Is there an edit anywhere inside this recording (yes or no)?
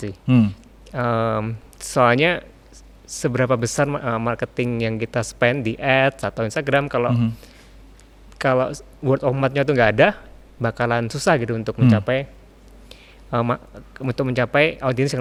no